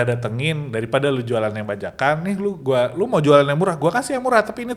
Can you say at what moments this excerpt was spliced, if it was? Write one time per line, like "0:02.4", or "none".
none

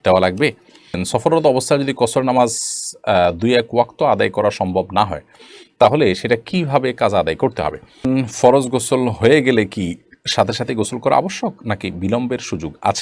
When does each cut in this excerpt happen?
0:01.0
0:08.1

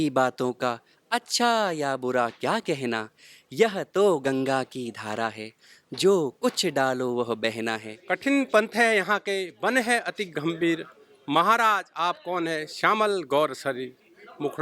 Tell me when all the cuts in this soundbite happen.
0:07.9

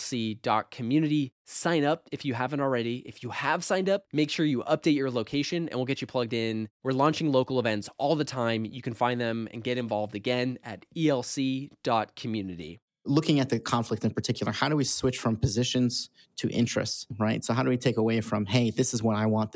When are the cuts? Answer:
0:13.0

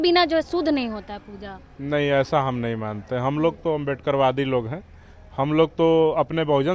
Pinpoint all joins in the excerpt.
none

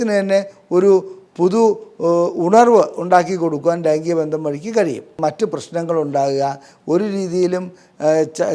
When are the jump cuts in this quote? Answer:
0:05.2

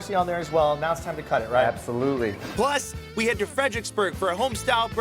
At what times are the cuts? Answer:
0:02.6

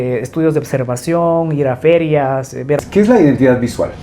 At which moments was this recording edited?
0:02.8

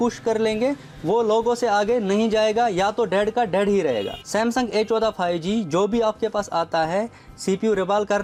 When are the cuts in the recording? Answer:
none

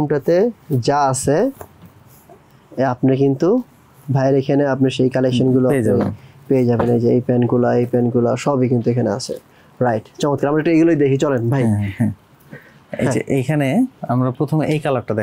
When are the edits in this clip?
none

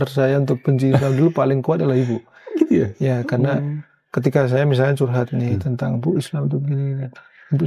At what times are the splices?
none

